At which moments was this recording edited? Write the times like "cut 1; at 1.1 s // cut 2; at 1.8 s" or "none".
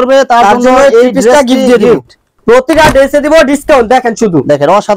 cut 1; at 2.3 s